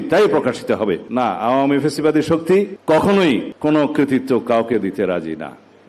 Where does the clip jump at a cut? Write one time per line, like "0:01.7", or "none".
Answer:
0:01.0
0:02.8
0:03.5